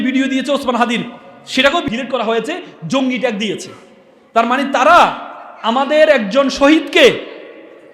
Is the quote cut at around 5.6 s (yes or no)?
no